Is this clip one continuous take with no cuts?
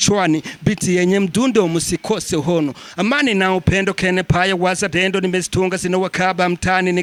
yes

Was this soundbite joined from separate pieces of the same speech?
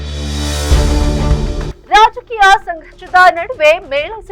yes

